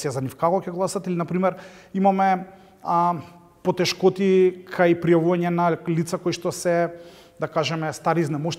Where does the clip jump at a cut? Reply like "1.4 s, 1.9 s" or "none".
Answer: none